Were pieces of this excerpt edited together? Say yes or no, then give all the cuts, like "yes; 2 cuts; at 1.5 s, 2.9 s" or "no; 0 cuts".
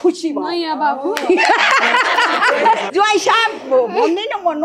yes; 1 cut; at 2.9 s